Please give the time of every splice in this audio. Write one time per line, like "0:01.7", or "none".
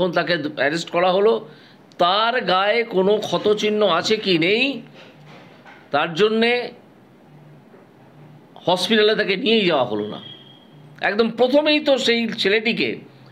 none